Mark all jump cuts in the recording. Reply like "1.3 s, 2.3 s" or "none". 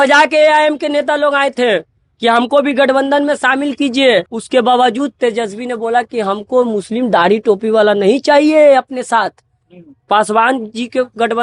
4.3 s